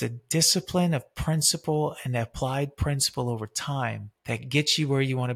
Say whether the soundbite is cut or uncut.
cut